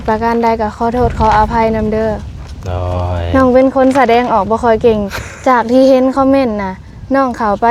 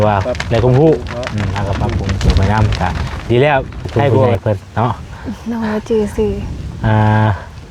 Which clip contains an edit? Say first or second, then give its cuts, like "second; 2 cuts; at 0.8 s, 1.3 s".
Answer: second; 1 cut; at 4.3 s